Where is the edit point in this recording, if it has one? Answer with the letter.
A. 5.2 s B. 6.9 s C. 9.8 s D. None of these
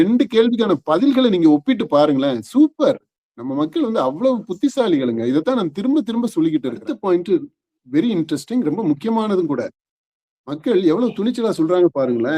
B